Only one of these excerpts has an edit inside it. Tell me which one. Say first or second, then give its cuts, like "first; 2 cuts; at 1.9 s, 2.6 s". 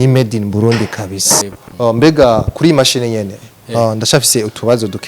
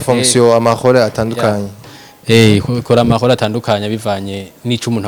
first; 1 cut; at 1.5 s